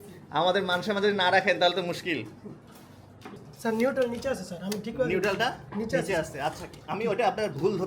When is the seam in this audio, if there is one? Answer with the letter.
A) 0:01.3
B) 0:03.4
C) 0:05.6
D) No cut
B